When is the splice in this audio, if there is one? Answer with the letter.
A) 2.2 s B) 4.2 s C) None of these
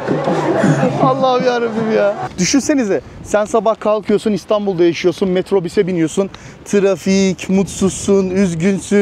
A